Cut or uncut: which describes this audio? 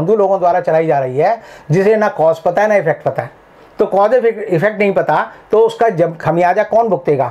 uncut